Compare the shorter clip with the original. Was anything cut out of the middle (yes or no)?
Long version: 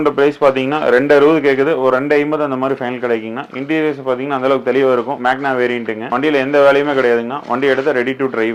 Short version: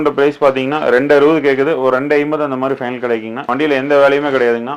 yes